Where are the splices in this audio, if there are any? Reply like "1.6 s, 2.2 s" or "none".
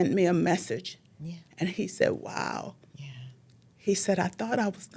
none